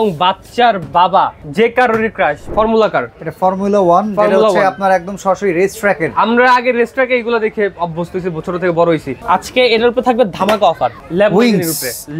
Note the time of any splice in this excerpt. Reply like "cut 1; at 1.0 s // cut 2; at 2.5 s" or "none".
cut 1; at 1.4 s // cut 2; at 2.4 s // cut 3; at 9.1 s // cut 4; at 11.0 s